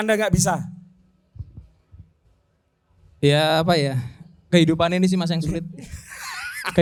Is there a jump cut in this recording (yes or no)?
no